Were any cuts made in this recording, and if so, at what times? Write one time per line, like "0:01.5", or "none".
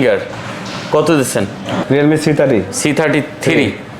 0:01.8